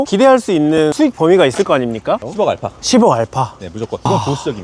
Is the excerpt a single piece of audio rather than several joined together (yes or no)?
no